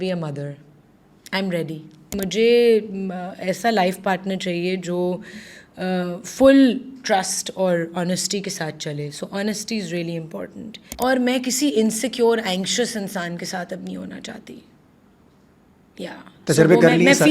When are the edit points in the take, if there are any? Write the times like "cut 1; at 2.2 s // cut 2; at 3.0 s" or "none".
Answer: cut 1; at 2.2 s // cut 2; at 10.9 s